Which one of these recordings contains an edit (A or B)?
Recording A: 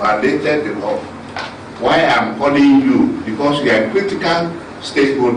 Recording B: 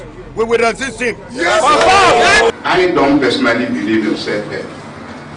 B